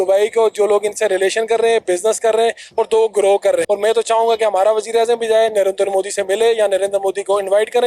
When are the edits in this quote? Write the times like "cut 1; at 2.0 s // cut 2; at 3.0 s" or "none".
cut 1; at 3.6 s